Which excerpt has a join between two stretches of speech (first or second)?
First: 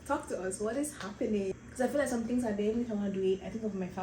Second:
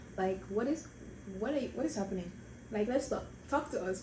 first